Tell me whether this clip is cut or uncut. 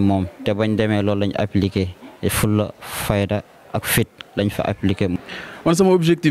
cut